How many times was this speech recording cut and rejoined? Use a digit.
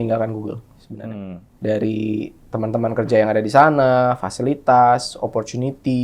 2